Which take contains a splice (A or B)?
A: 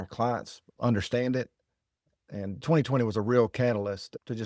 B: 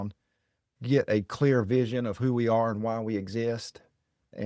A